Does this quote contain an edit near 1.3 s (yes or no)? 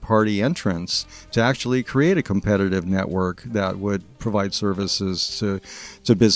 no